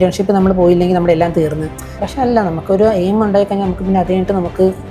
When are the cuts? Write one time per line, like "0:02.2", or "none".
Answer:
0:02.0